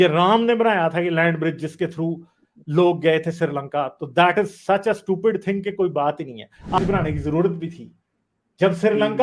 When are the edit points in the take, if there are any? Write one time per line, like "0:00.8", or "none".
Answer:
0:06.8